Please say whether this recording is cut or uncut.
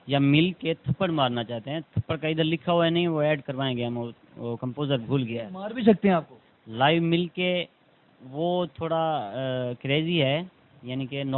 uncut